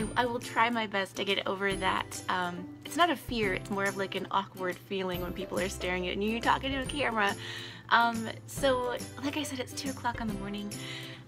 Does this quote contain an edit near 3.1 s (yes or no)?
yes